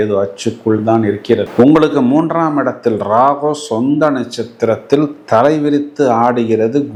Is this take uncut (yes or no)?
yes